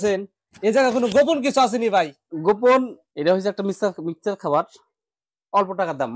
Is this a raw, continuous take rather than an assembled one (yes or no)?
no